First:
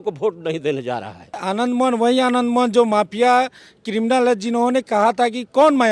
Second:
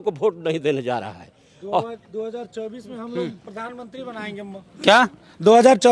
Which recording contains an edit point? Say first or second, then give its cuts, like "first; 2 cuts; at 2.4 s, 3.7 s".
first; 1 cut; at 1.4 s